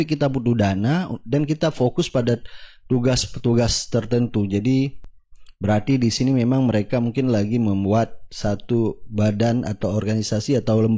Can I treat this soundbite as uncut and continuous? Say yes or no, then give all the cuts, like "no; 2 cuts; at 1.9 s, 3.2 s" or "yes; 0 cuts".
yes; 0 cuts